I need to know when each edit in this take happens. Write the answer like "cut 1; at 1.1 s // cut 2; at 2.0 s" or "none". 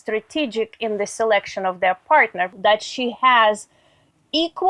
cut 1; at 2.5 s